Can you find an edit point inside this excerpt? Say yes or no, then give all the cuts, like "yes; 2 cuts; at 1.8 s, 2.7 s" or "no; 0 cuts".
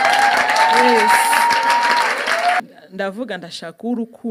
yes; 1 cut; at 2.6 s